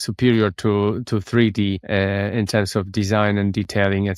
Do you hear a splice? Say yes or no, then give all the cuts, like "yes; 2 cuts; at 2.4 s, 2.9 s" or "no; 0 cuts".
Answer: yes; 1 cut; at 1.8 s